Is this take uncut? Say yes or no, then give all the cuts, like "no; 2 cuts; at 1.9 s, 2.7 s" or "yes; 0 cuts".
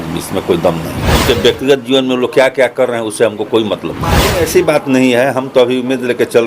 no; 2 cuts; at 1.1 s, 4.3 s